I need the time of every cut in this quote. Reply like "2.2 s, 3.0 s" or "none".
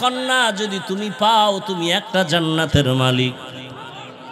none